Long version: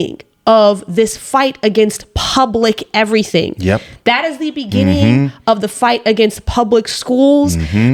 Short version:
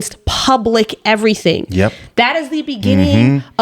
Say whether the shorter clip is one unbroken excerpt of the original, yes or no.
yes